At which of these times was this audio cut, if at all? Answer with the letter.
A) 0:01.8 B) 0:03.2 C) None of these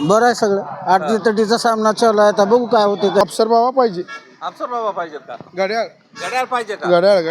B